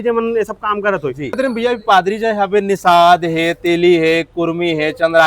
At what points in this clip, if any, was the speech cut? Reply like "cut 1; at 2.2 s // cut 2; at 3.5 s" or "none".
cut 1; at 1.4 s